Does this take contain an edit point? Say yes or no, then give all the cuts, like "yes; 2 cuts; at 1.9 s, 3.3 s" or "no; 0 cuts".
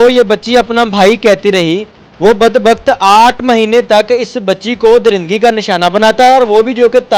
no; 0 cuts